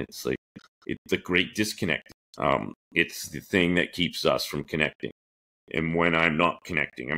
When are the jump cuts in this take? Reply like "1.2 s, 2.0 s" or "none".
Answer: 2.1 s